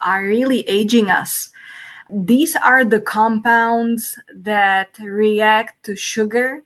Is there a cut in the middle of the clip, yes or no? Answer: yes